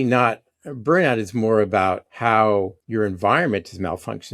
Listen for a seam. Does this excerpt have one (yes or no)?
yes